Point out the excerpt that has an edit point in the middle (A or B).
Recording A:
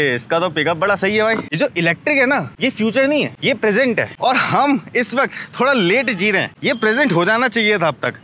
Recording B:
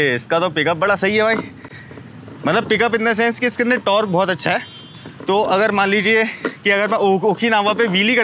A